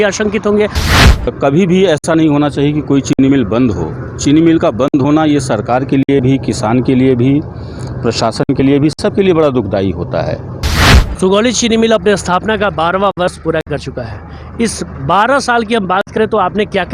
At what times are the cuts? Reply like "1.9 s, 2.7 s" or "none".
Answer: 1.3 s, 10.7 s